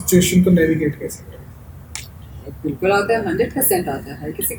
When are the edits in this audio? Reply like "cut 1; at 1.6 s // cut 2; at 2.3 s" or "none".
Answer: none